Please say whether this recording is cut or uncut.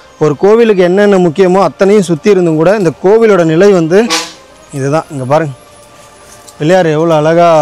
uncut